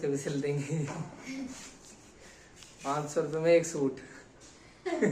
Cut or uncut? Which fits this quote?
uncut